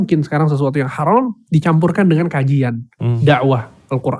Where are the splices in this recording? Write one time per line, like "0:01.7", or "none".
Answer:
none